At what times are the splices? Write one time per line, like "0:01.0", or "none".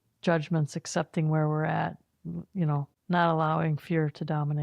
0:02.9